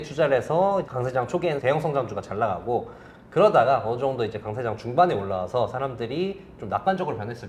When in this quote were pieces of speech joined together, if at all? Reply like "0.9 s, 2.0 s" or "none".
none